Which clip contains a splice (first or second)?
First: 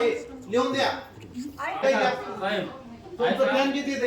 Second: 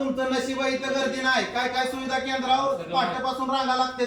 first